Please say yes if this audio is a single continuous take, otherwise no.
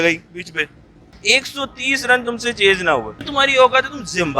no